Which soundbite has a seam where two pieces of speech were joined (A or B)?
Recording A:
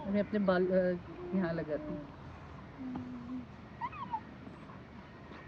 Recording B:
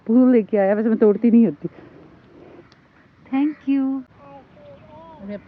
B